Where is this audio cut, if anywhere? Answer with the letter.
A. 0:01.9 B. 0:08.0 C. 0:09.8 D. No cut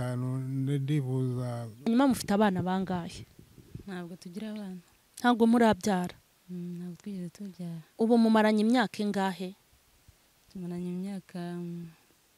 A